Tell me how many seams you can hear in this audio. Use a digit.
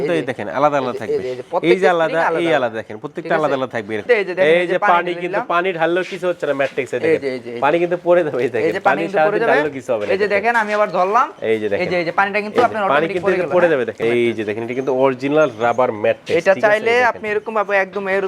2